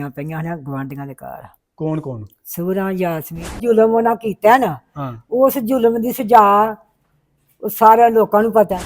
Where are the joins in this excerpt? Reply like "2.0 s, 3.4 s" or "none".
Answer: 3.6 s